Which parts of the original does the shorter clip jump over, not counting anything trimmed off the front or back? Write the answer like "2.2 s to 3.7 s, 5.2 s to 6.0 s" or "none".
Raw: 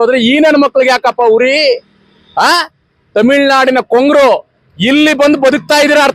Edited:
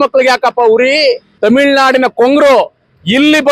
1.9 s to 3.0 s